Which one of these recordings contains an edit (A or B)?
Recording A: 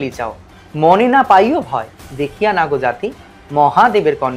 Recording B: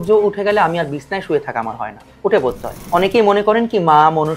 B